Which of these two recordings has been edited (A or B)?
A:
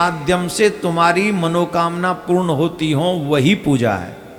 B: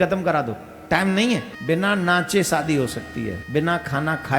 B